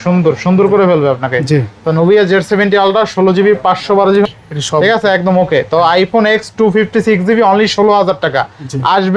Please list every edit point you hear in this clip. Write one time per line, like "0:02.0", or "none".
0:04.2